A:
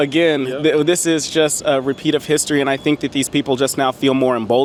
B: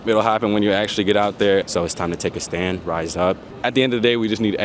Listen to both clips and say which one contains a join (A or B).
B